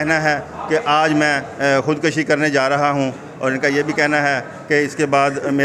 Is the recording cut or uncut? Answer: uncut